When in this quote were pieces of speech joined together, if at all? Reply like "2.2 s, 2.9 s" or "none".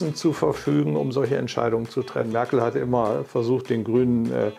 2.3 s